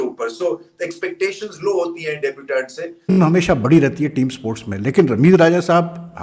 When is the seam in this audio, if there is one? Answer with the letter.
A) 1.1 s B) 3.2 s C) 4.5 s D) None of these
B